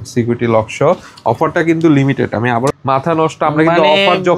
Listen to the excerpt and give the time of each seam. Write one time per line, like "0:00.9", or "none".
0:02.7